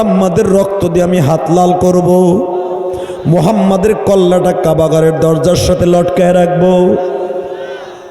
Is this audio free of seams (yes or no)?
yes